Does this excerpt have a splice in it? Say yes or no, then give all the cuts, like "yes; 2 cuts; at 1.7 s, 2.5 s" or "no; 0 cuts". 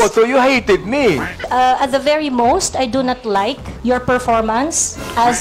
yes; 1 cut; at 1.4 s